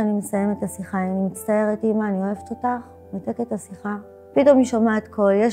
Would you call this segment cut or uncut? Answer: uncut